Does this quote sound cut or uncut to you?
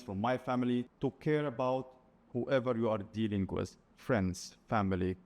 cut